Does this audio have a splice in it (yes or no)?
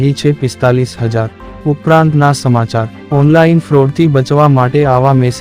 yes